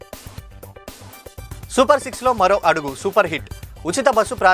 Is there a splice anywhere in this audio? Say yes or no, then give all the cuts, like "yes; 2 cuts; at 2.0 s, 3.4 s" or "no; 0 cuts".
yes; 1 cut; at 1.6 s